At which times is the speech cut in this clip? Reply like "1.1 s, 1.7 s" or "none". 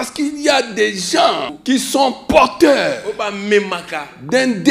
1.5 s